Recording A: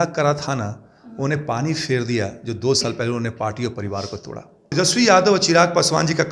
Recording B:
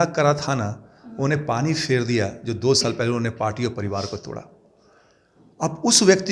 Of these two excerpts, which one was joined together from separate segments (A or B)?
A